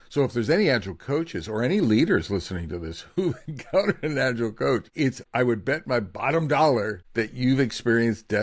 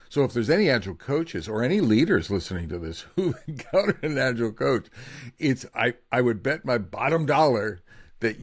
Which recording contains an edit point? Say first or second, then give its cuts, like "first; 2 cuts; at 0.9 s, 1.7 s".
first; 2 cuts; at 5.2 s, 7.0 s